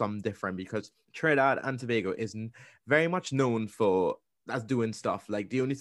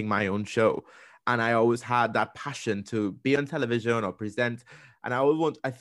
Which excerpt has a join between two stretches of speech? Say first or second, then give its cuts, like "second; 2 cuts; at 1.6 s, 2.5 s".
first; 2 cuts; at 1.0 s, 4.3 s